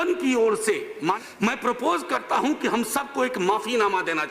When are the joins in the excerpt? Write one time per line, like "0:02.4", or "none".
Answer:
0:01.2